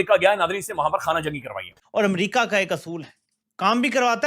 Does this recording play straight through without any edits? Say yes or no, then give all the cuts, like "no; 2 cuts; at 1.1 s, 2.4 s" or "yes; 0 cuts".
no; 1 cut; at 1.7 s